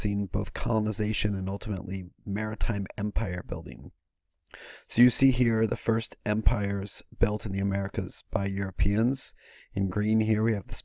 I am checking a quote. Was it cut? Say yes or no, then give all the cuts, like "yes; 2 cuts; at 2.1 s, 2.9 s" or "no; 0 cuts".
yes; 1 cut; at 4.8 s